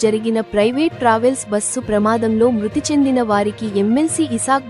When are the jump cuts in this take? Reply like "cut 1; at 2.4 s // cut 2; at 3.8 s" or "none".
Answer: none